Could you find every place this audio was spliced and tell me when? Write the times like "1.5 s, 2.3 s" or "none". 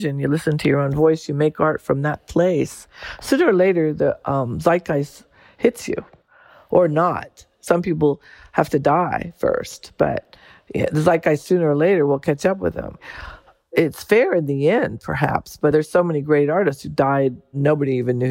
6.4 s, 13.7 s, 15.7 s, 17.5 s